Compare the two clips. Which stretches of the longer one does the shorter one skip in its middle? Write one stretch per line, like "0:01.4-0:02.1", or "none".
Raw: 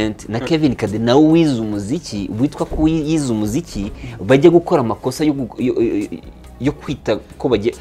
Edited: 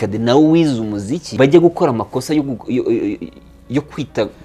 0:02.0-0:04.1